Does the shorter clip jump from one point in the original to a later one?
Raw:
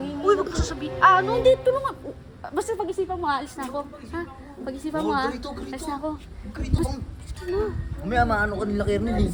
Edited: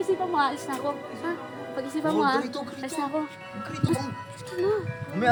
no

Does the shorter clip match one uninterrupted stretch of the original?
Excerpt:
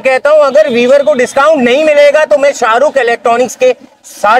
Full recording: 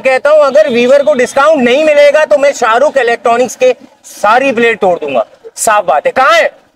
yes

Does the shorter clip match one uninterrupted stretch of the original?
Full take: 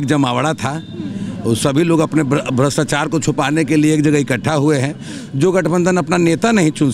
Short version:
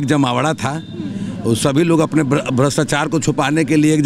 yes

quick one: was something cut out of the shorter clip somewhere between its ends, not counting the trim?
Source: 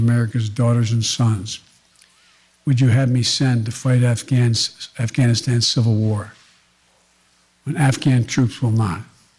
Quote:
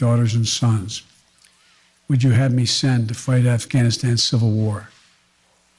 yes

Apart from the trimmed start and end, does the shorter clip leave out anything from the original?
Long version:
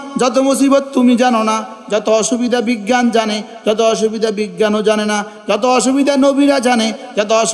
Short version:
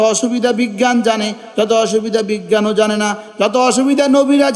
no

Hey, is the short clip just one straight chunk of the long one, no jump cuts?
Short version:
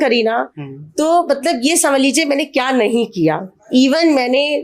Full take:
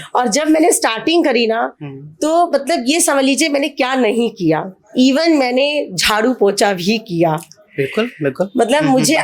yes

